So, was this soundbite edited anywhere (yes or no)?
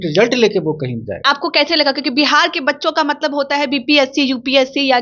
yes